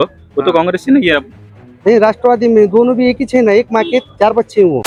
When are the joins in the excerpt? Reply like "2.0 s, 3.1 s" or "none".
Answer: none